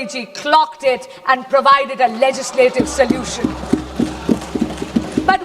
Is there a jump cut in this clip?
no; 0 cuts

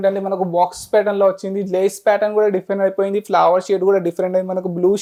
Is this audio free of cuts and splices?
yes; 0 cuts

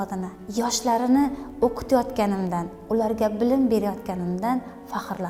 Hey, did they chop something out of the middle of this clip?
no; 0 cuts

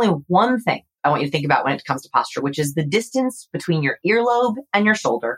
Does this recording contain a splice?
yes; 1 cut; at 0.9 s

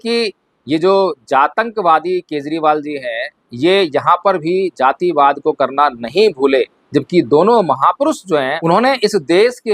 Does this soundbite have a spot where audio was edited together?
yes; 1 cut; at 8.5 s

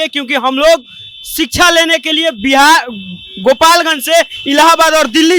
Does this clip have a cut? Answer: no; 0 cuts

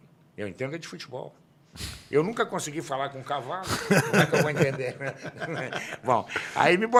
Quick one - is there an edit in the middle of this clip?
no; 0 cuts

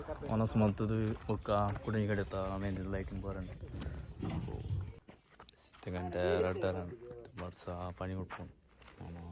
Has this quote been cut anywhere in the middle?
yes; 1 cut; at 5.1 s

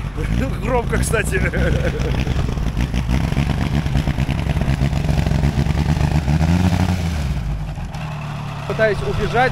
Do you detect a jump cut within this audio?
no; 0 cuts

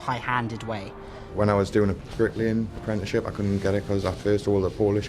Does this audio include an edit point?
yes; 2 cuts; at 1.2 s, 2.0 s

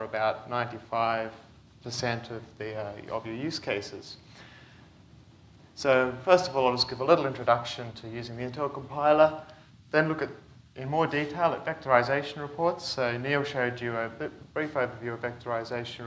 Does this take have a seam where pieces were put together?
no; 0 cuts

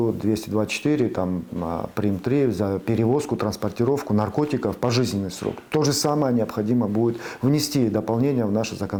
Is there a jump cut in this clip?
no; 0 cuts

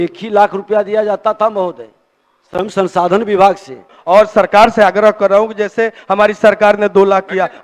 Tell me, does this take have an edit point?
yes; 1 cut; at 3.9 s

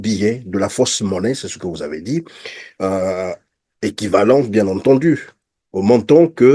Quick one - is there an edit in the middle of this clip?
no; 0 cuts

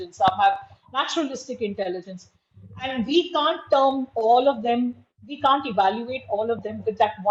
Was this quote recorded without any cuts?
yes; 0 cuts

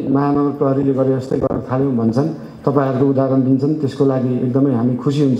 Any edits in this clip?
no; 0 cuts

